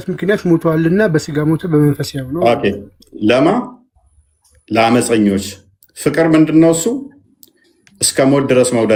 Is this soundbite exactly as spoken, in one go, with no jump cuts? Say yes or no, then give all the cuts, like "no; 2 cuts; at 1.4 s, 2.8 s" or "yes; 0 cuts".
yes; 0 cuts